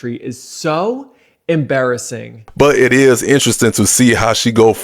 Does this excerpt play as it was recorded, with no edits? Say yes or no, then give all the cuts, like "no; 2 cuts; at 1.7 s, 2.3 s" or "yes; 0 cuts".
no; 1 cut; at 2.4 s